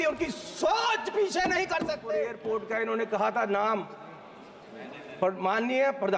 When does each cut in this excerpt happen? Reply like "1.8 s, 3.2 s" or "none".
2.3 s